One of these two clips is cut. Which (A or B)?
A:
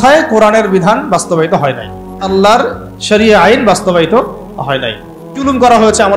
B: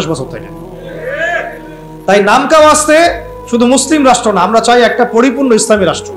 A